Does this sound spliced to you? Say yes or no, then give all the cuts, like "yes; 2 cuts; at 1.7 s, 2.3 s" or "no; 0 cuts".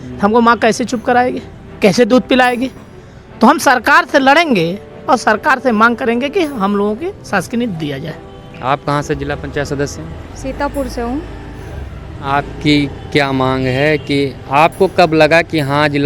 no; 0 cuts